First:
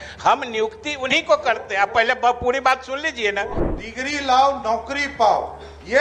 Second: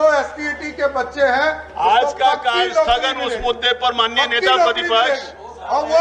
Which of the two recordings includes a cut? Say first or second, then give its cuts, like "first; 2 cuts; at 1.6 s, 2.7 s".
first; 1 cut; at 3.6 s